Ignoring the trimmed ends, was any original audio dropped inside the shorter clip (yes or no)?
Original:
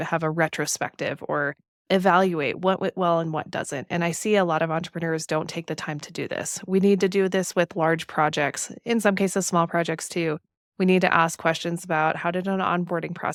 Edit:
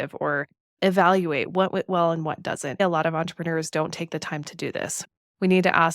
yes